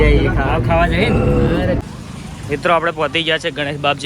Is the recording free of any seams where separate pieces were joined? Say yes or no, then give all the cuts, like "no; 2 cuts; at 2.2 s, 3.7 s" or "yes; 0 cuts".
no; 1 cut; at 1.8 s